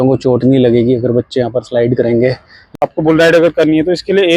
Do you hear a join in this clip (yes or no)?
yes